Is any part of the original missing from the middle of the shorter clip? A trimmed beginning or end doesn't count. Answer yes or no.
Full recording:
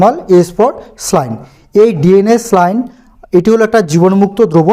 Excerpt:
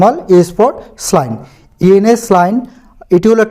yes